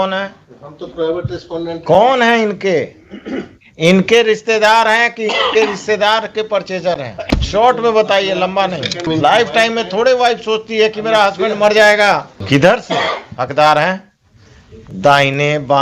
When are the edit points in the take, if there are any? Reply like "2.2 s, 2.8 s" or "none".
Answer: 7.2 s, 9.1 s, 12.4 s